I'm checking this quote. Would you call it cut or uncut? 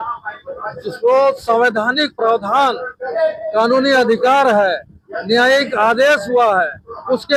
uncut